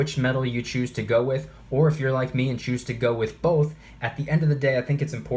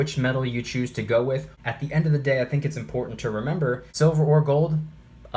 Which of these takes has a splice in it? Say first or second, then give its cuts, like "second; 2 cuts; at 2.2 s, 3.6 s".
second; 2 cuts; at 1.5 s, 3.9 s